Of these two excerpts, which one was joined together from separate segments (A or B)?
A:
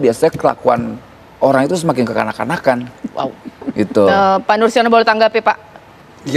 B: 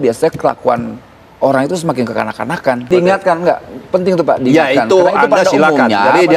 B